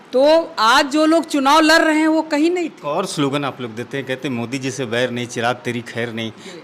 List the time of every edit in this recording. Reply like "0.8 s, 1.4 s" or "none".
2.8 s

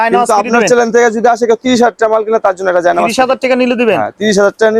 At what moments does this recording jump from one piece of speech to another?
none

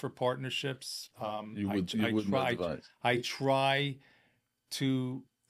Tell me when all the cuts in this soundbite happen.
none

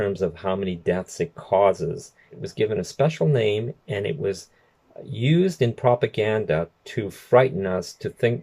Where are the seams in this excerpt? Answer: 2.4 s

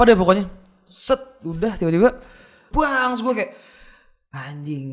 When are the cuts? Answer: 2.6 s

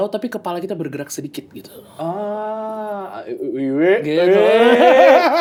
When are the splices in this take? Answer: none

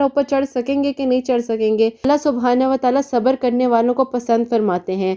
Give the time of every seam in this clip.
2.0 s

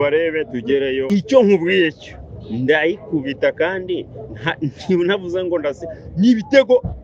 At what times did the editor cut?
1.1 s

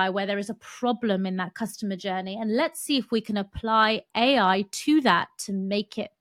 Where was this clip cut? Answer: none

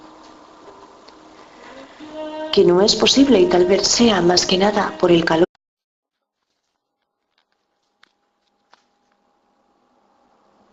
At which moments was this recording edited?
none

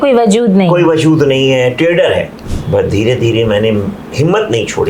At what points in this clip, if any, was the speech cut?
2.4 s

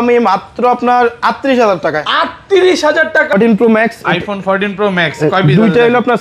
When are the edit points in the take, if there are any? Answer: 3.3 s

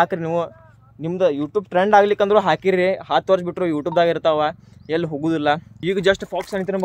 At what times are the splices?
5.8 s

